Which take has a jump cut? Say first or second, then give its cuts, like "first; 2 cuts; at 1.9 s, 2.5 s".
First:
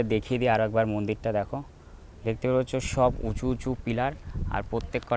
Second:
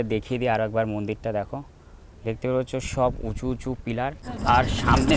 second; 1 cut; at 4.2 s